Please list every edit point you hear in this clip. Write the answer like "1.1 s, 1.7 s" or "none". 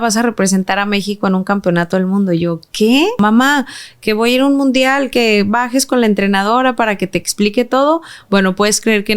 3.2 s

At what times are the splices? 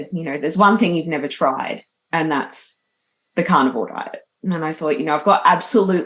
none

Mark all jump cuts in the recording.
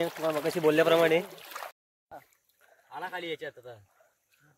1.8 s

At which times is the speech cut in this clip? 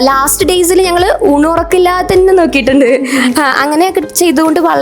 none

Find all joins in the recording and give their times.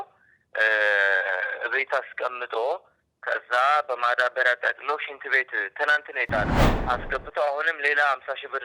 6.7 s

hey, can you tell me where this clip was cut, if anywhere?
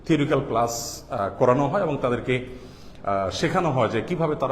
none

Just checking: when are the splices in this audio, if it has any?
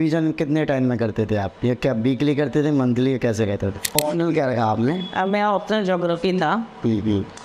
3.8 s

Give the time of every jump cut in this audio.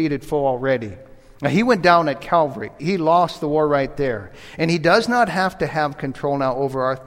2.8 s

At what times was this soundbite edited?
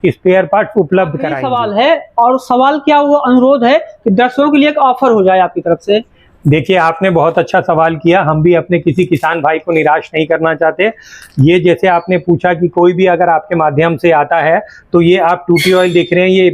1.4 s

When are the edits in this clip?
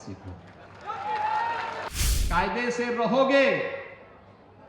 1.9 s

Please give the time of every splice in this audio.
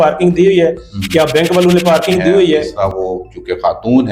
2.7 s

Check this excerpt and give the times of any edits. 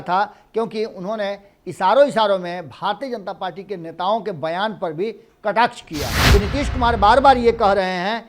6.2 s

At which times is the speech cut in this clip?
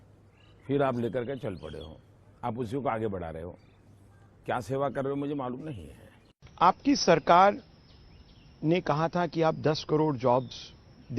6.3 s

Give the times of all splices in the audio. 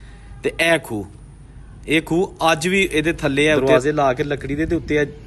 3.6 s

